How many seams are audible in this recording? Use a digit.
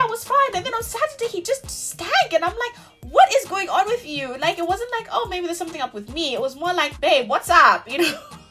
0